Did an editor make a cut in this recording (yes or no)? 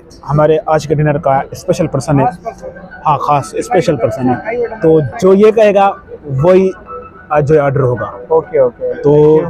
no